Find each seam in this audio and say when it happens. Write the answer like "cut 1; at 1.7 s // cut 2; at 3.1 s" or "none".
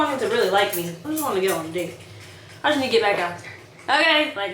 cut 1; at 1.0 s